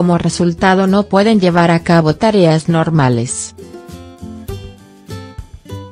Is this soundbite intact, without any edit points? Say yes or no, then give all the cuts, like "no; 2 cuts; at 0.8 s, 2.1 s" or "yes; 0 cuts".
yes; 0 cuts